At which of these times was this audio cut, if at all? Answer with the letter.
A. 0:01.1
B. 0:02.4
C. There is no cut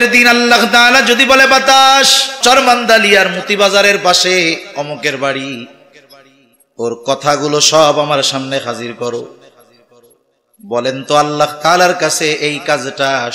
B